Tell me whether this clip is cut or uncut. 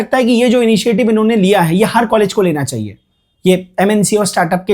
uncut